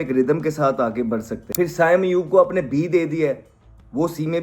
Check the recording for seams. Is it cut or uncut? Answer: cut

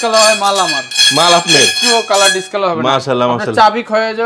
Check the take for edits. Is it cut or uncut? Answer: uncut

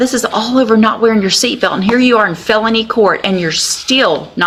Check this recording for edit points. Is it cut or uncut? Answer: uncut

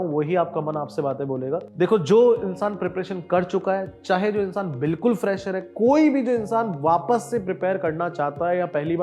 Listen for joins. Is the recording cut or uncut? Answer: cut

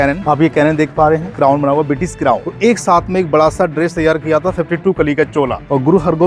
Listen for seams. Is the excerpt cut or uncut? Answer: cut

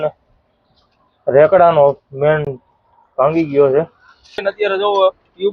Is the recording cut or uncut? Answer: cut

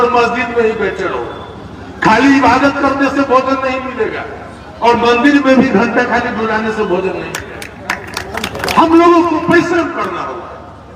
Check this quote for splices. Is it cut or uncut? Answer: uncut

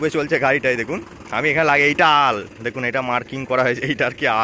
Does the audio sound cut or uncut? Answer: uncut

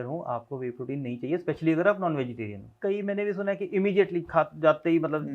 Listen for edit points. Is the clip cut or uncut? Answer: cut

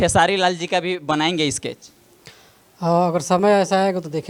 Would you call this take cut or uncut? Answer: uncut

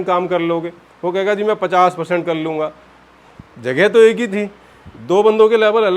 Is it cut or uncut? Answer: uncut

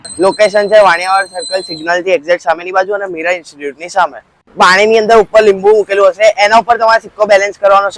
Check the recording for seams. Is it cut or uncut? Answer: cut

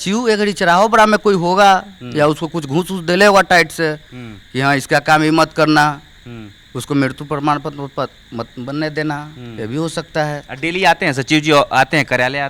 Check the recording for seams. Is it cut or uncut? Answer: uncut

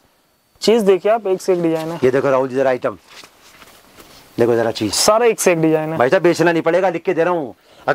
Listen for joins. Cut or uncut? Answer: uncut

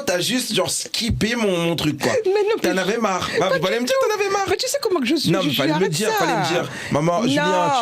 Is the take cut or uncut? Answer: uncut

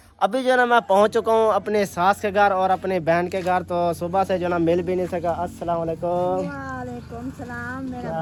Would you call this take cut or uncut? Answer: uncut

